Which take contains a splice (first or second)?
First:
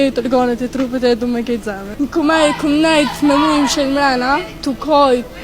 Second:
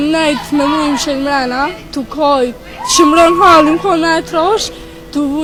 first